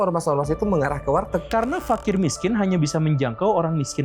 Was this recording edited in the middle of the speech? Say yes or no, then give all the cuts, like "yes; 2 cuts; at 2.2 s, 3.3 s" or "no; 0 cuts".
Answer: yes; 1 cut; at 1.5 s